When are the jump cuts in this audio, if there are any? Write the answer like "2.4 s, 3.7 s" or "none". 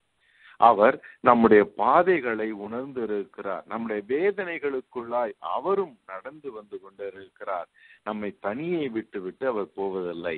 none

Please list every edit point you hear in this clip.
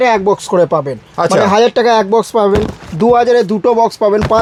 none

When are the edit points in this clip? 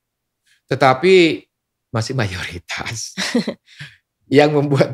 none

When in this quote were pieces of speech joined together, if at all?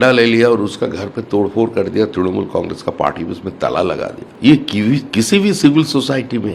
4.2 s

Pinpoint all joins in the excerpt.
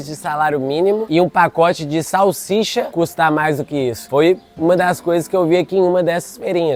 none

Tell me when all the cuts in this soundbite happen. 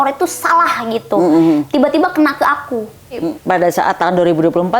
3.2 s

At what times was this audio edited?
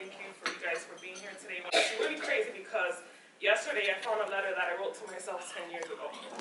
1.7 s

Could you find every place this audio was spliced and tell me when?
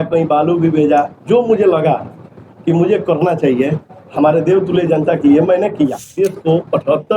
6.1 s

